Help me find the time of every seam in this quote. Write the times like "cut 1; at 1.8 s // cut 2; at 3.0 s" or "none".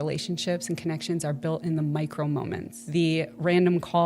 cut 1; at 2.7 s